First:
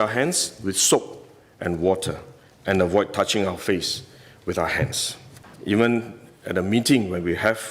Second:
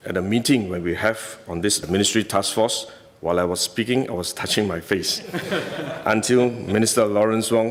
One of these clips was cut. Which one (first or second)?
first